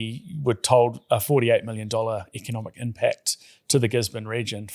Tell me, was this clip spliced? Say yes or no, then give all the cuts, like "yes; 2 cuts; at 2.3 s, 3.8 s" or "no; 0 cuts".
no; 0 cuts